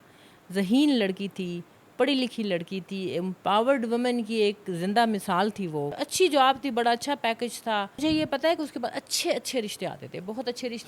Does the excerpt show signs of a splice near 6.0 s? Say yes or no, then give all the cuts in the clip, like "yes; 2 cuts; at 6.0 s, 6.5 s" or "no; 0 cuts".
yes; 2 cuts; at 6.0 s, 8.0 s